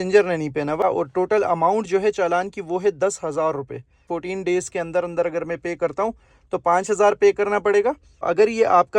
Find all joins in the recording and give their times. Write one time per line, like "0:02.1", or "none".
0:00.8
0:04.1
0:08.2